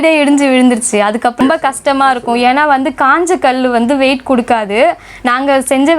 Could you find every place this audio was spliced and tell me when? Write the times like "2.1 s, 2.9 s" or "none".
1.3 s